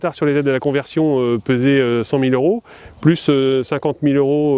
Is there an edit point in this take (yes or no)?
no